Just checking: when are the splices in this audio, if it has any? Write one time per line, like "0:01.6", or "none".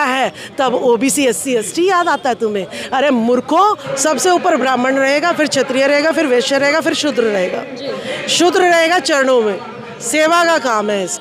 0:03.9